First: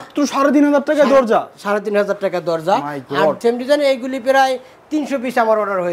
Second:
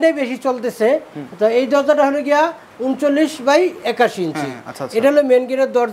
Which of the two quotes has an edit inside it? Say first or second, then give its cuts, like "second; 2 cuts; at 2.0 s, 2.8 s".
first; 1 cut; at 3.4 s